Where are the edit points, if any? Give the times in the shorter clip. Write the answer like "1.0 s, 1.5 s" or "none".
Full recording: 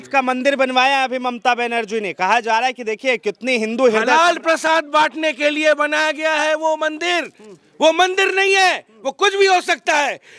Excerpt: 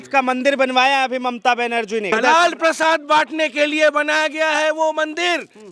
2.1 s